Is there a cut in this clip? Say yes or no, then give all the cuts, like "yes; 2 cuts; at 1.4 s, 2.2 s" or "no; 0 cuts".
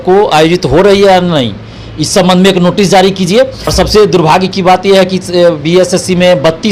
yes; 1 cut; at 3.7 s